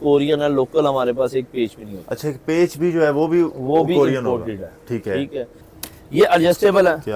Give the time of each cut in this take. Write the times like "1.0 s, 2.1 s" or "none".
5.6 s